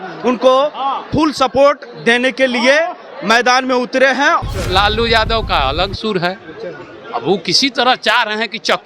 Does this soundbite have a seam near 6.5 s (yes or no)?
no